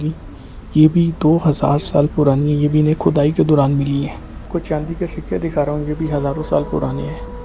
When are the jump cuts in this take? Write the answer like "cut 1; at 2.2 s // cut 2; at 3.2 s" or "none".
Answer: cut 1; at 4.5 s